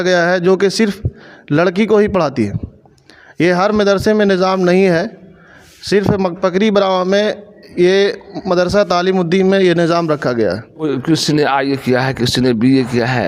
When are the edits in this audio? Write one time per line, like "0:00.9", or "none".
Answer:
0:10.9